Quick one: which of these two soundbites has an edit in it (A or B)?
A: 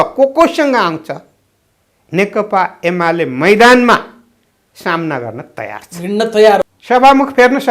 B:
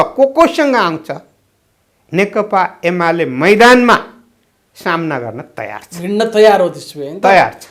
A